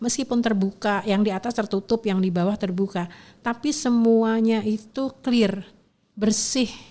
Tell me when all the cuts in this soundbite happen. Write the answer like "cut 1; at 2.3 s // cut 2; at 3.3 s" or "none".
none

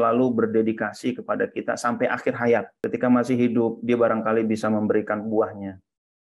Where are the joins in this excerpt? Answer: cut 1; at 2.7 s

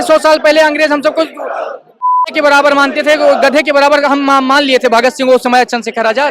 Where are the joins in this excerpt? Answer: none

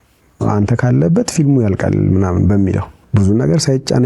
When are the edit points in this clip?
cut 1; at 3.0 s

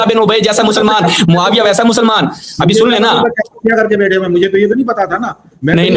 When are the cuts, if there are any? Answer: none

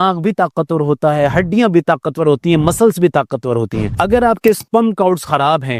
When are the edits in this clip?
cut 1; at 3.8 s

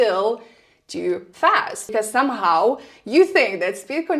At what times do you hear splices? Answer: cut 1; at 1.9 s

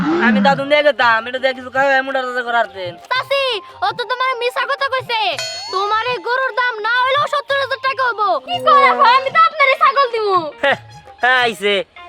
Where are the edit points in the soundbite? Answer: cut 1; at 3.0 s // cut 2; at 8.5 s

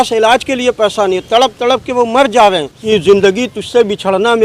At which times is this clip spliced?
cut 1; at 2.7 s

